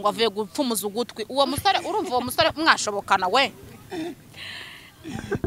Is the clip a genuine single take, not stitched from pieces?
yes; 0 cuts

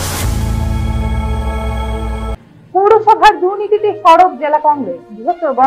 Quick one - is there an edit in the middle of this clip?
yes; 1 cut; at 2.4 s

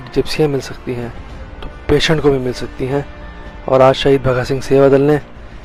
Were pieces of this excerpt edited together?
no; 0 cuts

